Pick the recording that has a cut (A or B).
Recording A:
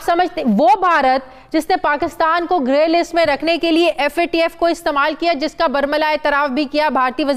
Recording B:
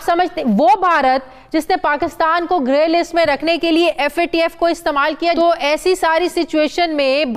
B